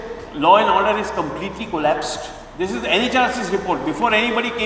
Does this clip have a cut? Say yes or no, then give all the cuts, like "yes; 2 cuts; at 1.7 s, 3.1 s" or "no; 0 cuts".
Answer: yes; 1 cut; at 2.4 s